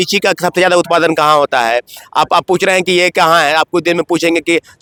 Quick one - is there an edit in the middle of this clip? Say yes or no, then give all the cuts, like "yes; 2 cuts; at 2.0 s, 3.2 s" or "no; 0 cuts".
no; 0 cuts